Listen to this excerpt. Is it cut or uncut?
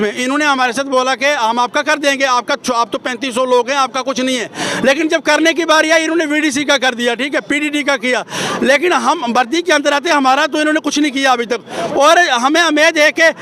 uncut